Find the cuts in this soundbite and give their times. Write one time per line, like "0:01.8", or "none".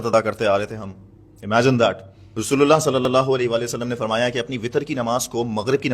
0:02.4